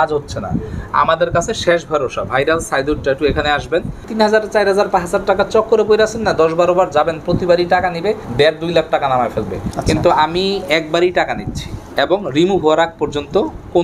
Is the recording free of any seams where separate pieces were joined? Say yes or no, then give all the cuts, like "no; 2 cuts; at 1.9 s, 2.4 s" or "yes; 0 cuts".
no; 2 cuts; at 4.1 s, 8.2 s